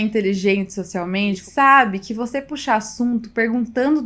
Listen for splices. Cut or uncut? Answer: cut